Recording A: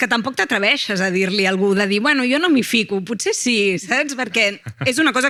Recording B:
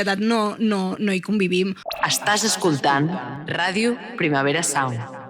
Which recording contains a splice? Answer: B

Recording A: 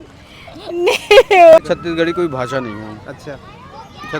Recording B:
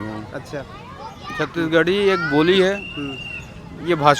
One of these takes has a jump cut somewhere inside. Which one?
A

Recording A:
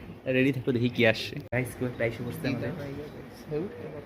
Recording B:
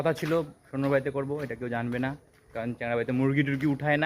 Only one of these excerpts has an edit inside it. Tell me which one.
A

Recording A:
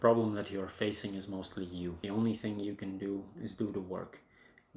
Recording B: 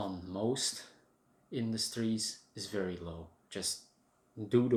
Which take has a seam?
A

